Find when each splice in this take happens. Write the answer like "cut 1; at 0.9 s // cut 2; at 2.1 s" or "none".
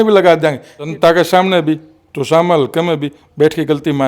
cut 1; at 0.9 s